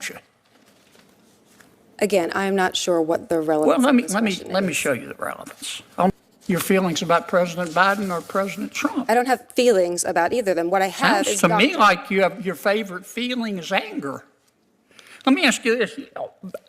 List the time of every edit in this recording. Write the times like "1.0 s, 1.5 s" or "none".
6.1 s